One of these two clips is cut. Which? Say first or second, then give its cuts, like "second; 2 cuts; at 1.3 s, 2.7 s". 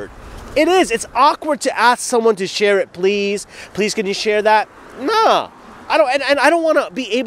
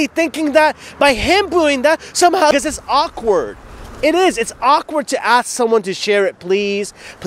second; 1 cut; at 2.5 s